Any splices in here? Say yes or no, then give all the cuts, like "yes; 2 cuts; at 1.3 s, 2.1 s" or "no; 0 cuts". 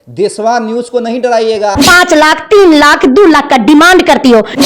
yes; 1 cut; at 1.7 s